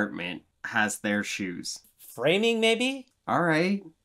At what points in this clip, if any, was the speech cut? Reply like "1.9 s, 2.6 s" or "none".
none